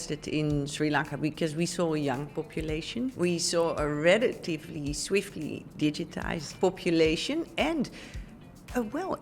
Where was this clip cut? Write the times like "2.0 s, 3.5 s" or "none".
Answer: 3.1 s, 6.5 s